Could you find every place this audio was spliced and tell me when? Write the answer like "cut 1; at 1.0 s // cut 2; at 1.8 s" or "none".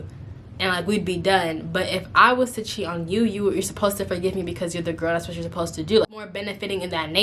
cut 1; at 6.3 s